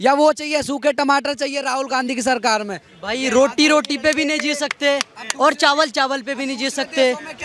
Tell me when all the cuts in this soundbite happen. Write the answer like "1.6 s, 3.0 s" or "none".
none